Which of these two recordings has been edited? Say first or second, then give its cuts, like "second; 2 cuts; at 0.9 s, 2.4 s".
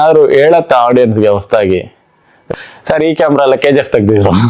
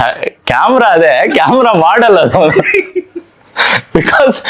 first; 1 cut; at 2.4 s